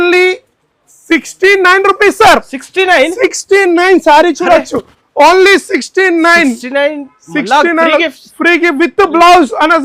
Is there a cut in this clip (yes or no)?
no